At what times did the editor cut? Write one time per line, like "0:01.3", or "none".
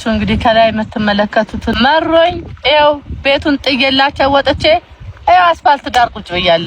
0:01.7